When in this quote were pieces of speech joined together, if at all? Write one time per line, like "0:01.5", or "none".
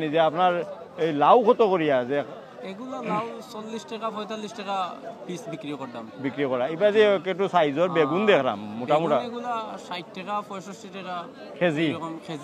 none